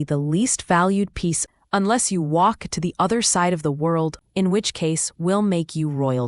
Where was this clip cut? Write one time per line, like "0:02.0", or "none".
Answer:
0:01.4
0:04.2